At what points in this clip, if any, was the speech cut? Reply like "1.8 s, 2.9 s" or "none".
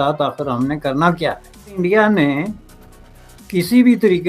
1.8 s